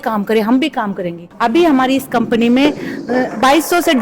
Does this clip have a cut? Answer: yes; 1 cut; at 1.3 s

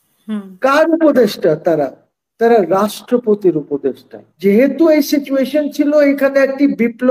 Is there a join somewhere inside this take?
yes; 1 cut; at 4.2 s

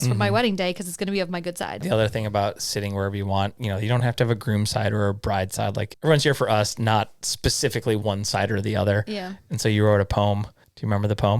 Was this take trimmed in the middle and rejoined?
yes; 2 cuts; at 1.8 s, 3.6 s

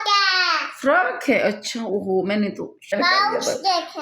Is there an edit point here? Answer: yes; 1 cut; at 2.9 s

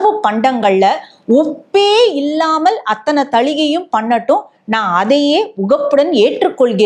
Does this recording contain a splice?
no; 0 cuts

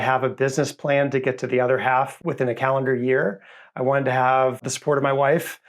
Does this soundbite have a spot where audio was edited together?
yes; 2 cuts; at 2.2 s, 4.6 s

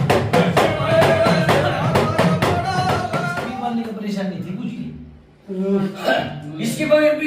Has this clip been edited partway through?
yes; 1 cut; at 3.2 s

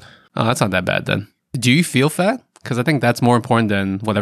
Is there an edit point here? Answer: no; 0 cuts

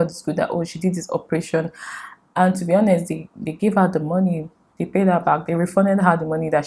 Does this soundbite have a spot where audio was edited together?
no; 0 cuts

